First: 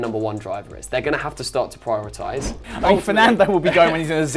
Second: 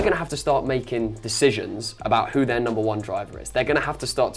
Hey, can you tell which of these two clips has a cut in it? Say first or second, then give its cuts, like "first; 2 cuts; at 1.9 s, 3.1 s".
first; 1 cut; at 2.7 s